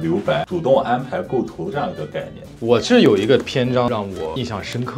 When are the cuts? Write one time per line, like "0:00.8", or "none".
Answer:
none